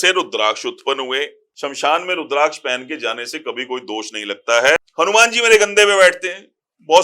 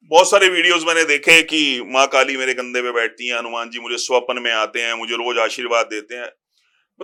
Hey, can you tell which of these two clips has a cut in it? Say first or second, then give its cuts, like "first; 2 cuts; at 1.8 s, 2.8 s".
first; 2 cuts; at 1.4 s, 4.8 s